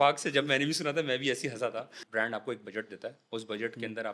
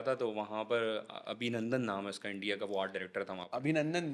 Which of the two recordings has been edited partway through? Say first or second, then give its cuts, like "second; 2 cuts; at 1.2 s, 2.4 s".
first; 1 cut; at 2.0 s